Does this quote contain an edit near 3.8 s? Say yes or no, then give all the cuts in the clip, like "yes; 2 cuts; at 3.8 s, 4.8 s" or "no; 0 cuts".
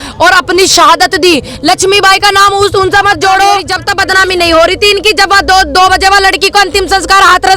yes; 1 cut; at 3.8 s